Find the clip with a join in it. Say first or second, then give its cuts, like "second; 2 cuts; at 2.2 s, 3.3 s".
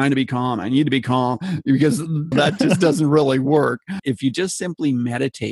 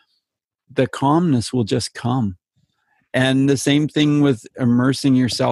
first; 2 cuts; at 2.3 s, 3.9 s